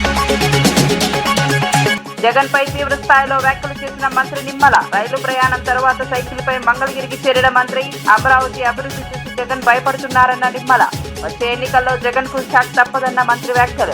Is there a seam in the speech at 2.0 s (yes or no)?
yes